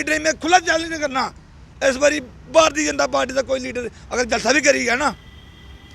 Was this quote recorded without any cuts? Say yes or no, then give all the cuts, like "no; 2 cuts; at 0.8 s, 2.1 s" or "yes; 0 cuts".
yes; 0 cuts